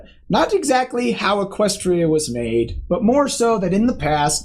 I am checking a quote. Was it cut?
yes; 1 cut; at 1.0 s

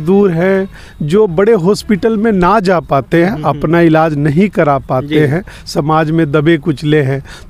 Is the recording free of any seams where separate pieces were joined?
yes; 0 cuts

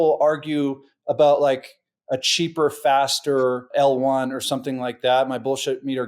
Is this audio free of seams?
no; 1 cut; at 3.7 s

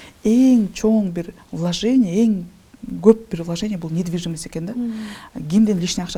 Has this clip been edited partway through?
no; 0 cuts

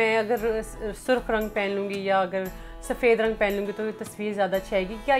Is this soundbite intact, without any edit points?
yes; 0 cuts

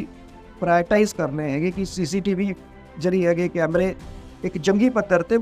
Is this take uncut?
yes; 0 cuts

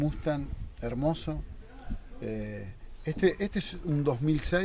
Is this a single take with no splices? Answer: yes; 0 cuts

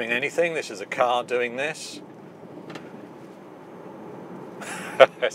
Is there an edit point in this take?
no; 0 cuts

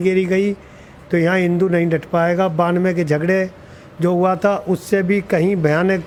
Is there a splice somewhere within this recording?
no; 0 cuts

